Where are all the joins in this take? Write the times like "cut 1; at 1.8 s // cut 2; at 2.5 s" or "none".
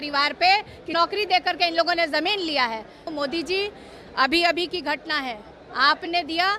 cut 1; at 0.9 s // cut 2; at 3.1 s